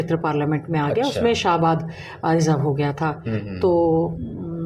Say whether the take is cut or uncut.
uncut